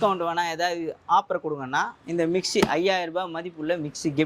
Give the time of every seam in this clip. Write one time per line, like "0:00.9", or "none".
none